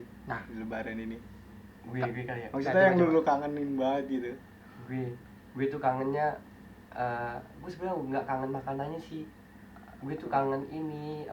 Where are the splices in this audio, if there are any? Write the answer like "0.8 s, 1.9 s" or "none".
none